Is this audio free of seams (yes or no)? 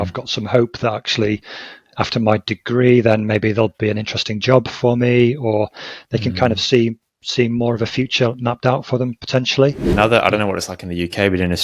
no